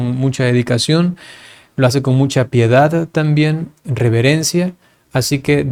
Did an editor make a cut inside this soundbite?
no; 0 cuts

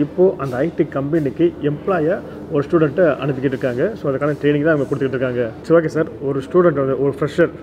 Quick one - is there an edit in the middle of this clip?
no; 0 cuts

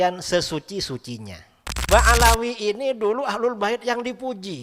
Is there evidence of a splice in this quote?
yes; 1 cut; at 1.8 s

